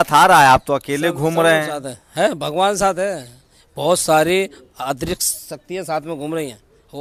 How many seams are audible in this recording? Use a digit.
0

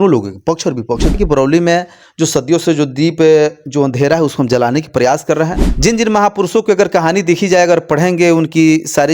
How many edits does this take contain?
2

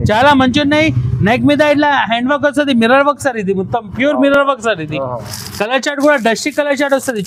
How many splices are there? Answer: 0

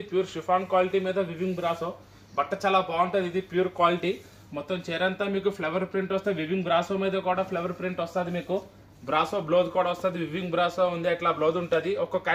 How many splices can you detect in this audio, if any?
0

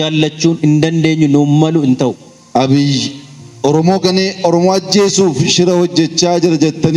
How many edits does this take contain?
1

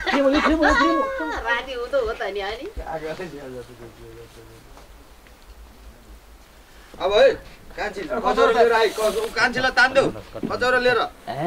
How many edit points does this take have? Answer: 1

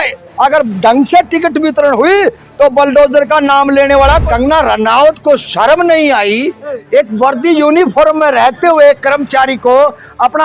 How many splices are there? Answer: 1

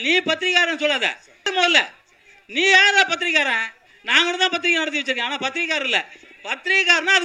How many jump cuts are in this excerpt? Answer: 1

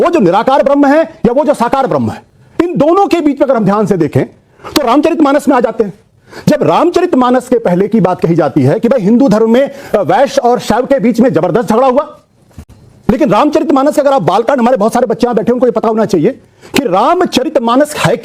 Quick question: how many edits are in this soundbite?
1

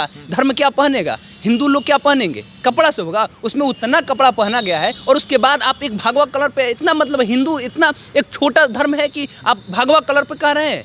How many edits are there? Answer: 0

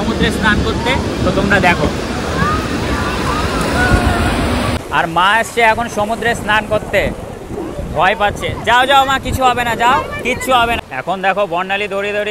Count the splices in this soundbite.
2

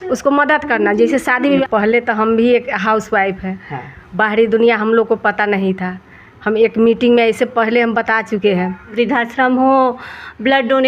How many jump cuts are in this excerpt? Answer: 2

